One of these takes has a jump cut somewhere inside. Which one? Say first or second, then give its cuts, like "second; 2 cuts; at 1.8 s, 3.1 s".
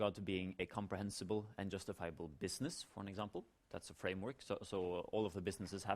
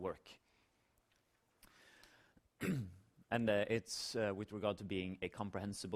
first; 1 cut; at 2.8 s